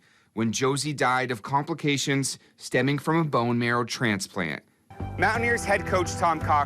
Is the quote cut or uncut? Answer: cut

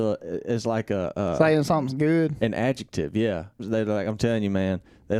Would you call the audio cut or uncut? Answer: cut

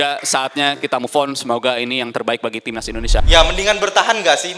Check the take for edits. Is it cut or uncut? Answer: cut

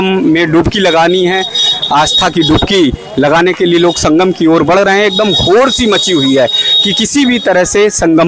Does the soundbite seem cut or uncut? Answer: uncut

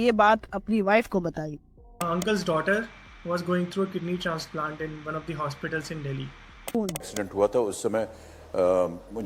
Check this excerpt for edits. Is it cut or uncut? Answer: cut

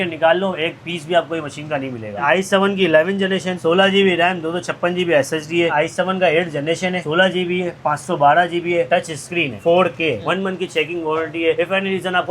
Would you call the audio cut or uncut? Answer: cut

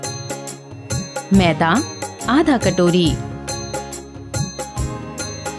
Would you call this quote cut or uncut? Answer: cut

